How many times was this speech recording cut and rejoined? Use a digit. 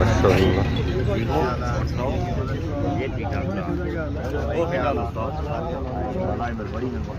0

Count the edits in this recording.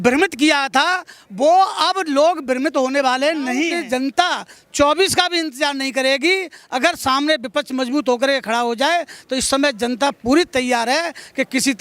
1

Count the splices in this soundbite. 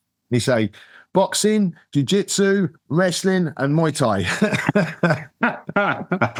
0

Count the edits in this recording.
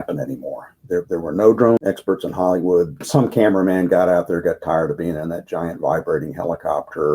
2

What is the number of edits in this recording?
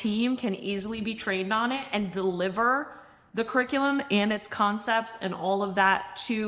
0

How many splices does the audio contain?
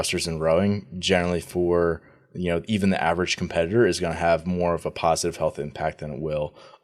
0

